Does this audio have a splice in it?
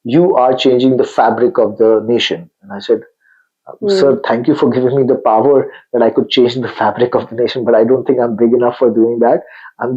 no; 0 cuts

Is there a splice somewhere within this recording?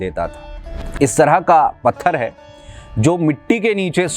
yes; 1 cut; at 0.9 s

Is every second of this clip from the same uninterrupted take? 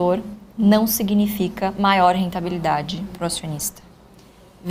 yes; 0 cuts

